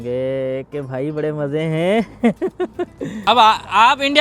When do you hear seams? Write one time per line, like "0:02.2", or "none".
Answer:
0:03.2